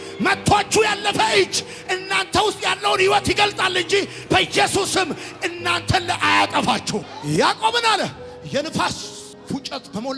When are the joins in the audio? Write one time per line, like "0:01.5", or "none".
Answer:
none